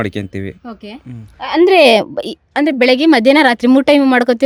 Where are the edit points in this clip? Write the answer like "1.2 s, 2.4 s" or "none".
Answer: none